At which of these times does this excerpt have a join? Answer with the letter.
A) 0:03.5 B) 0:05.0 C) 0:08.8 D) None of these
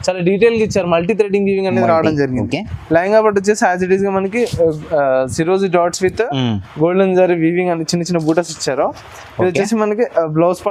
D